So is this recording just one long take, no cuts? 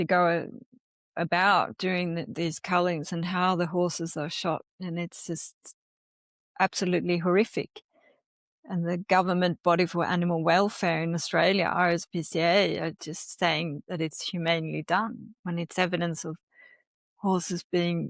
yes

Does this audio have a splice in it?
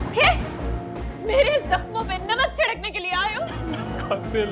yes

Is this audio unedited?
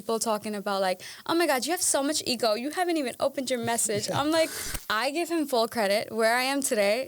no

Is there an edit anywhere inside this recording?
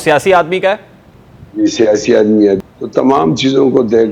yes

